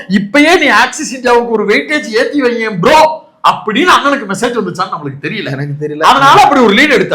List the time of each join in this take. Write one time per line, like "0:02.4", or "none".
none